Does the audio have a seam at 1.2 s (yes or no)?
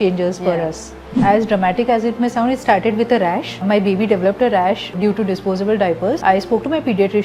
yes